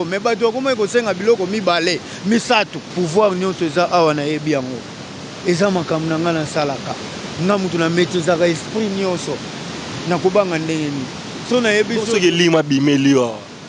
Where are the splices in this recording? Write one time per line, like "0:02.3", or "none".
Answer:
0:02.9